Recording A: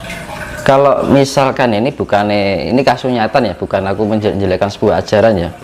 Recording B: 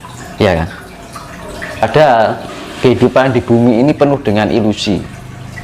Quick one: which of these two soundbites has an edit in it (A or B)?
B